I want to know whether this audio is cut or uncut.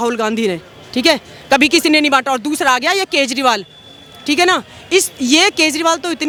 uncut